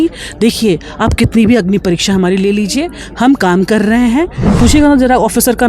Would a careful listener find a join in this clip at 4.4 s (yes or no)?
yes